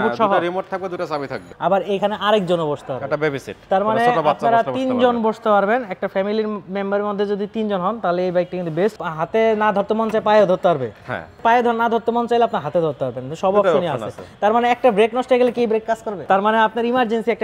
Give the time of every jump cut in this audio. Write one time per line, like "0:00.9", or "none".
0:01.5
0:09.1
0:11.4
0:16.2